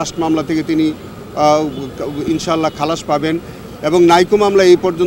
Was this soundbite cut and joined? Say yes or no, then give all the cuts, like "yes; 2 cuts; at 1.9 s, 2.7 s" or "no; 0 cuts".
no; 0 cuts